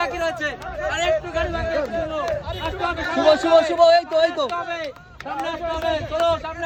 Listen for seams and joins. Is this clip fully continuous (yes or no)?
yes